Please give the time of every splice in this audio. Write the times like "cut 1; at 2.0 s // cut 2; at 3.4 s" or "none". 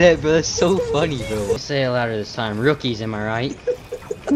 cut 1; at 1.6 s